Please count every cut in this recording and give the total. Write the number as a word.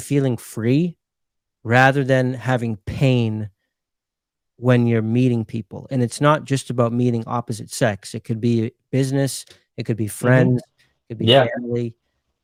zero